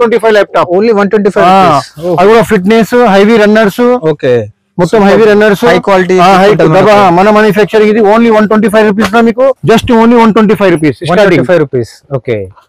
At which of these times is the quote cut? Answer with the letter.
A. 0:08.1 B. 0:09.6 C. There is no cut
B